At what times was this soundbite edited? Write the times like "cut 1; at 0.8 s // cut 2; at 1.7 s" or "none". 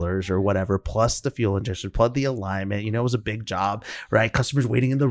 none

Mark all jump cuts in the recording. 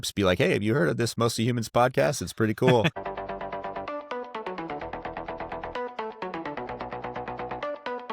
cut 1; at 3.0 s

